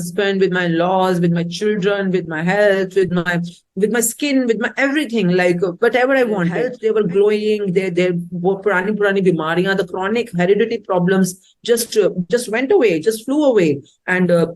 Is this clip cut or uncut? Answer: cut